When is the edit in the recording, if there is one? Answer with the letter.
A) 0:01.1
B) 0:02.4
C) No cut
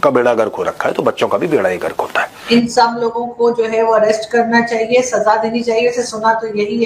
B